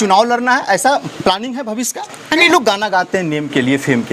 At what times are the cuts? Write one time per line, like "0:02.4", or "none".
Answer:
0:02.4